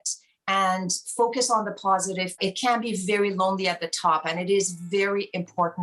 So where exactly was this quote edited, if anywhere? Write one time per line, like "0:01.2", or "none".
0:02.4